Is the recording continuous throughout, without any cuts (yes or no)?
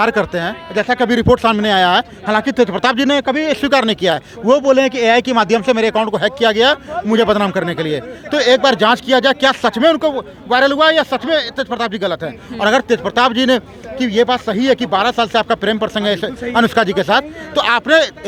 yes